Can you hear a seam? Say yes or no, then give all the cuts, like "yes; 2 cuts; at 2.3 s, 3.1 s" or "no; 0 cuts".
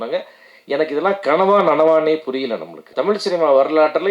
yes; 1 cut; at 2.9 s